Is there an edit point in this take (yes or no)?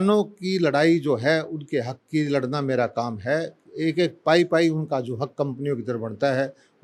no